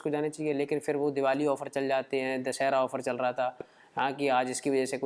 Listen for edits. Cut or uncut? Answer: uncut